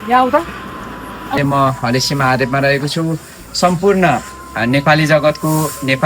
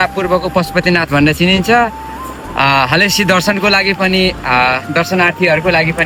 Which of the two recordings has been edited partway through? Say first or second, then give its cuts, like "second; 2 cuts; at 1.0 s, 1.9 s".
first; 1 cut; at 1.4 s